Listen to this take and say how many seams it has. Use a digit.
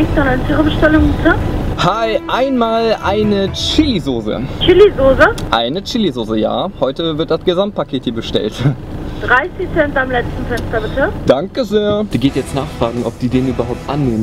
2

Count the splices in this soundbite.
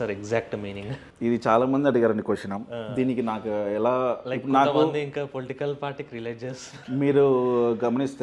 1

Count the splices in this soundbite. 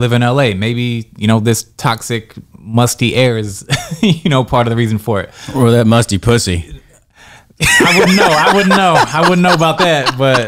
0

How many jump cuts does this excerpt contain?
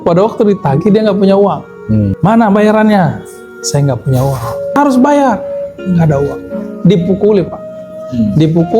2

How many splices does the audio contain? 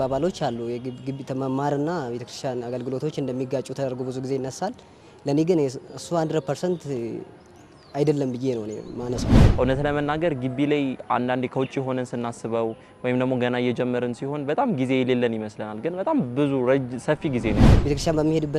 2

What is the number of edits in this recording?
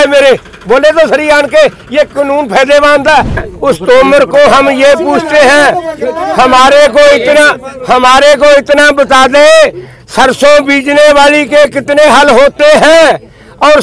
1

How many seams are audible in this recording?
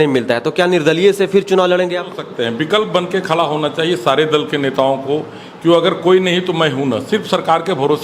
1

